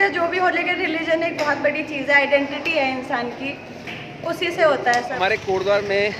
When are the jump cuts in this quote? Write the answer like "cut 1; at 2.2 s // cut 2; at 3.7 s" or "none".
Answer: cut 1; at 5.2 s

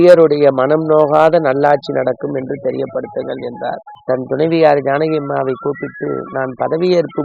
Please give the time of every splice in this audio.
cut 1; at 3.9 s

